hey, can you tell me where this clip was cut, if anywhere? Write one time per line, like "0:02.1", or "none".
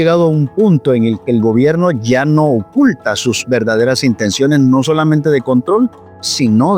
none